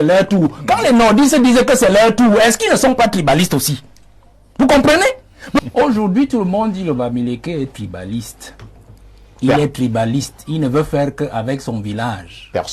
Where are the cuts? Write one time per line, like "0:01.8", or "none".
0:05.6